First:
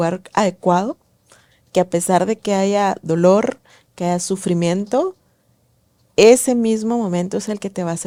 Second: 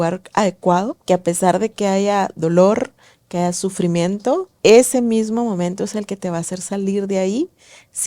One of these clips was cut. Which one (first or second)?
second